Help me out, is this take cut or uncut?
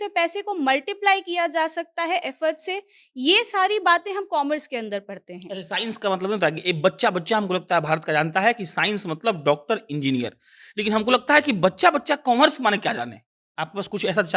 uncut